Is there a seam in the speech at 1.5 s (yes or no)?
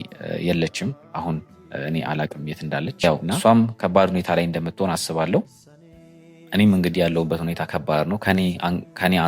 no